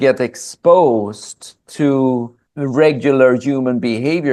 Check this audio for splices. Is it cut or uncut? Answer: cut